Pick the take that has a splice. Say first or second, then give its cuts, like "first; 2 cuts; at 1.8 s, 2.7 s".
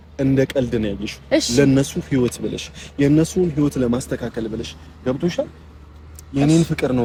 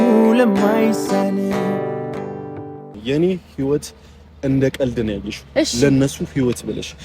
second; 1 cut; at 2.9 s